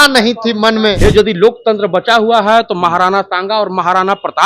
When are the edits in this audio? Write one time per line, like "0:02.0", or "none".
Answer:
0:01.0